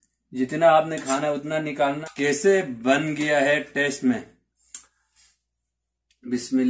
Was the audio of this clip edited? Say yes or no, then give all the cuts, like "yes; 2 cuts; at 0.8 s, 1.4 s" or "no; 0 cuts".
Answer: yes; 1 cut; at 2.0 s